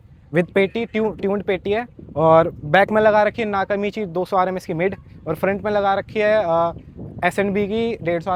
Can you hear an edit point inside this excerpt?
no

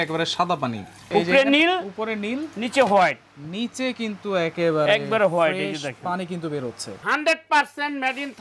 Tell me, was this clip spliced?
yes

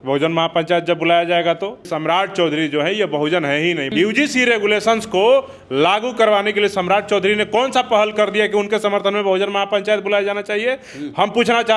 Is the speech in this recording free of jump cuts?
no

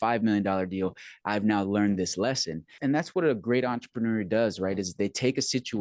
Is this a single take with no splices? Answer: no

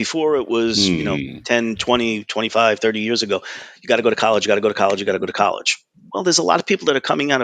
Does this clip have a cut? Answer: no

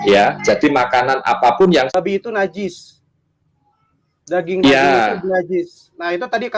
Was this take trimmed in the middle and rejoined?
yes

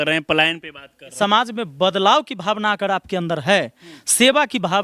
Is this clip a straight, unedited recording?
no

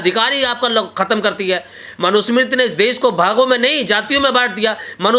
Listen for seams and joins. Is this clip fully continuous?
yes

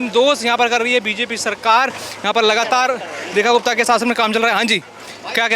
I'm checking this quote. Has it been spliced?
no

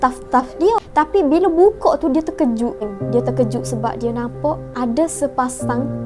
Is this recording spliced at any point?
yes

